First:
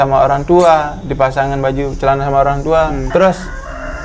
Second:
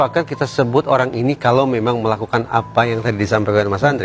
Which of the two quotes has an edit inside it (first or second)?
first